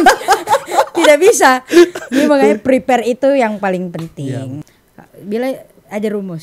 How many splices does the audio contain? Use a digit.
1